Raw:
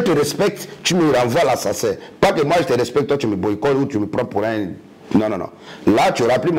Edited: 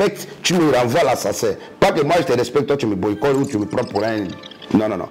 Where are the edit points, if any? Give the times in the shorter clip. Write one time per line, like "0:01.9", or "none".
none